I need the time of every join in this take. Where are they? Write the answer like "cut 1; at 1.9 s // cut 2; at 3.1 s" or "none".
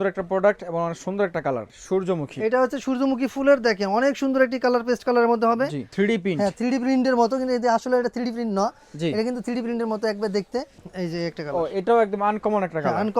cut 1; at 1.7 s // cut 2; at 5.9 s // cut 3; at 10.8 s